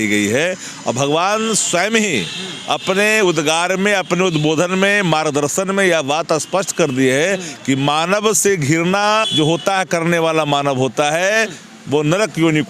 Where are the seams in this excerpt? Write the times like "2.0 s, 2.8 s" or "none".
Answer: 9.3 s